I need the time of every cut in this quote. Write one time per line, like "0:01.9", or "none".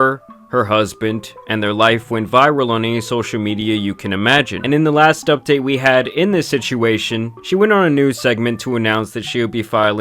0:04.6